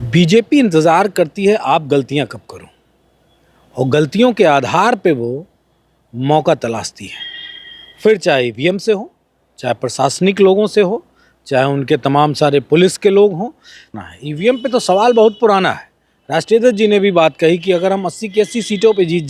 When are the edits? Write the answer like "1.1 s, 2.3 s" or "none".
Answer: 13.9 s